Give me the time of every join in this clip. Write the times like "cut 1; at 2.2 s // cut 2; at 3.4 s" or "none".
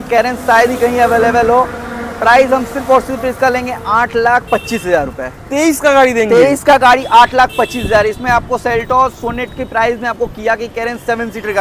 none